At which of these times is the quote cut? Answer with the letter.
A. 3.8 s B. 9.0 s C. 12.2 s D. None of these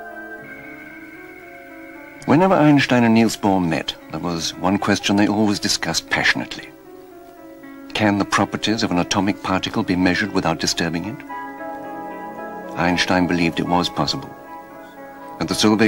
D